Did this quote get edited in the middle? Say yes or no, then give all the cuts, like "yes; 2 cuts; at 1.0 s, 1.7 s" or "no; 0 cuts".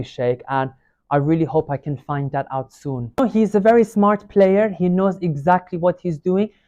yes; 1 cut; at 3.2 s